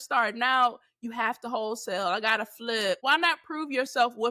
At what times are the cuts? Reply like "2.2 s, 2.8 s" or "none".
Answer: 3.0 s